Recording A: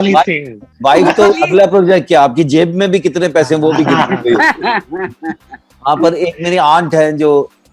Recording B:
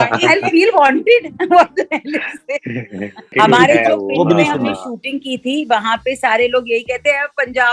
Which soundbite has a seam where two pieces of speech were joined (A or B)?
B